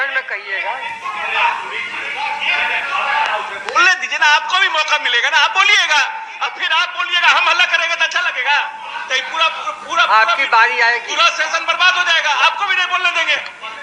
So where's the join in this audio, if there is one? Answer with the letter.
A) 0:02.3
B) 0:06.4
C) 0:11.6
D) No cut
D